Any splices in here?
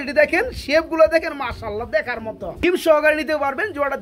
yes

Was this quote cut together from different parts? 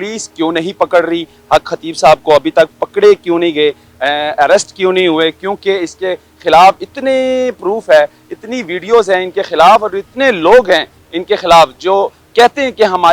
no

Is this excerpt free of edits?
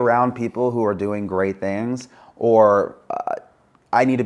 yes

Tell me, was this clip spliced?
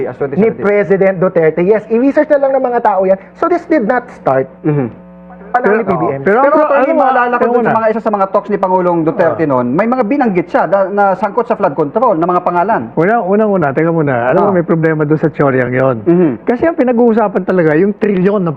no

